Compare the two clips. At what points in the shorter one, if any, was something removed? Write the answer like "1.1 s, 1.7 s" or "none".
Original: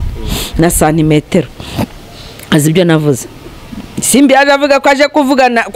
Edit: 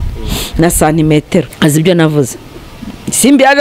1.5 s